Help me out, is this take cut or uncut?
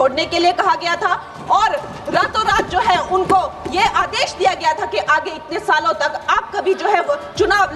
uncut